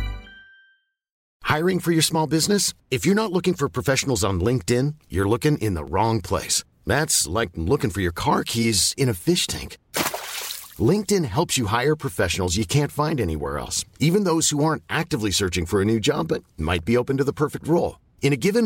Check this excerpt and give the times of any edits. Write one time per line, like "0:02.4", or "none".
0:01.3